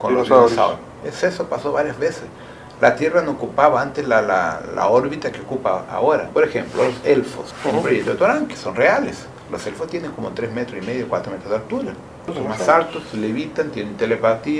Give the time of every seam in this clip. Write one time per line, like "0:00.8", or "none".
0:06.3
0:07.4
0:09.3
0:12.3